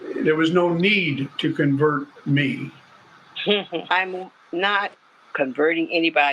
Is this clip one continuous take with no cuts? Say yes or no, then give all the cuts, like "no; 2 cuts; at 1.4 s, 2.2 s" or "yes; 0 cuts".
no; 1 cut; at 3.8 s